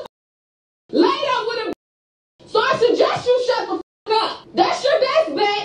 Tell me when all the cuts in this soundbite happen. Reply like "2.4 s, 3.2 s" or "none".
4.4 s